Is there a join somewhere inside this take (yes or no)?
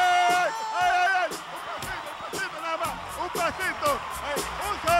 no